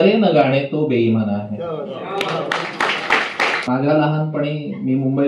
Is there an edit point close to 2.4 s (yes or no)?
no